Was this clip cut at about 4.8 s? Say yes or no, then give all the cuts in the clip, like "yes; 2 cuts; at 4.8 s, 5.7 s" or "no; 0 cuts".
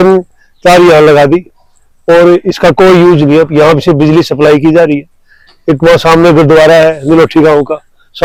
no; 0 cuts